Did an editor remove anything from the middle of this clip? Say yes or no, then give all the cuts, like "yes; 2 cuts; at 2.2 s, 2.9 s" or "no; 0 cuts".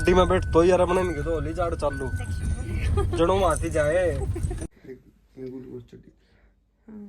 yes; 1 cut; at 4.5 s